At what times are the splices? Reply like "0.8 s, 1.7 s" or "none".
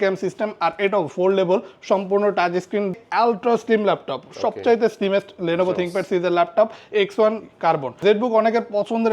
2.9 s, 7.9 s